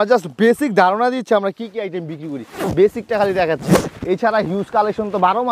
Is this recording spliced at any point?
no; 0 cuts

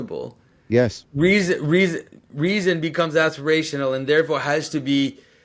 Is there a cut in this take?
no; 0 cuts

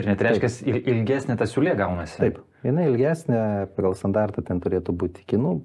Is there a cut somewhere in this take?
no; 0 cuts

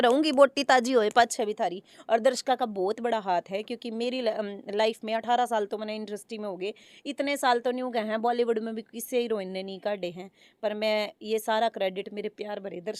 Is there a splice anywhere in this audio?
no; 0 cuts

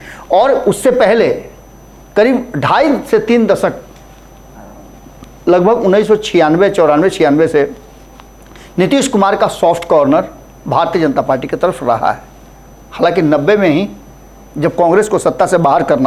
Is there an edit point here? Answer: no; 0 cuts

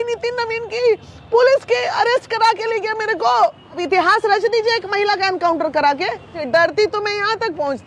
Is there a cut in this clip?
yes; 2 cuts; at 3.8 s, 6.4 s

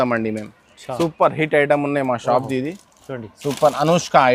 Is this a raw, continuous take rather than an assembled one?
yes; 0 cuts

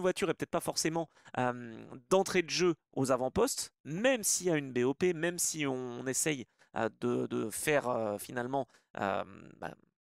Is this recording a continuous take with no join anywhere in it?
yes; 0 cuts

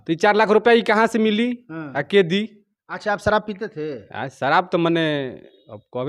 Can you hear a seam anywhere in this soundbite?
no; 0 cuts

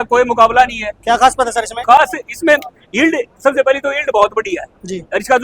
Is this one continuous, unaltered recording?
yes; 0 cuts

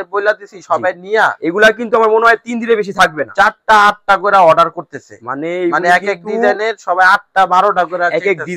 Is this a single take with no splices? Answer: yes; 0 cuts

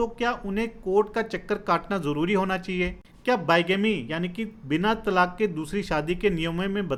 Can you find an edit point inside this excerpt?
no; 0 cuts

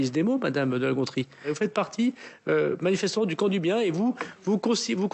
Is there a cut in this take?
yes; 1 cut; at 1.5 s

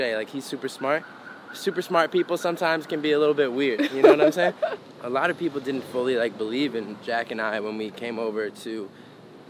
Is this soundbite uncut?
no; 1 cut; at 4.8 s

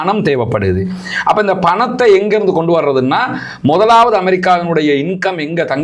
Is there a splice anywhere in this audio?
no; 0 cuts

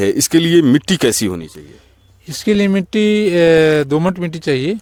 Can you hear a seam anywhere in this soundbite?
no; 0 cuts

